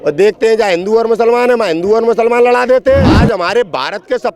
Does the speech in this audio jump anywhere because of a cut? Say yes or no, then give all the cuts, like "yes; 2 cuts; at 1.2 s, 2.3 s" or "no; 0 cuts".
yes; 1 cut; at 3.1 s